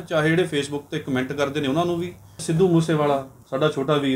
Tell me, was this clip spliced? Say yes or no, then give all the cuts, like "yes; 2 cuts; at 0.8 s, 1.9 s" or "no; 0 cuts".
yes; 1 cut; at 2.4 s